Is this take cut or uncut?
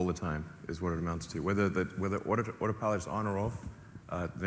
uncut